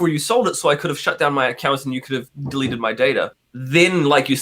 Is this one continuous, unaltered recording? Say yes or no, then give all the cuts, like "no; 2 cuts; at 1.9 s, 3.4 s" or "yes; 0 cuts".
no; 1 cut; at 3.4 s